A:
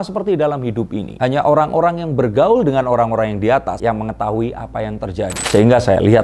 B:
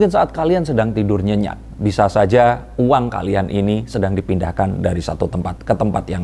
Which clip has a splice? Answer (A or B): A